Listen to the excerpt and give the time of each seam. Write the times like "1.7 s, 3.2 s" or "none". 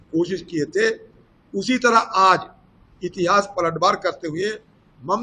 none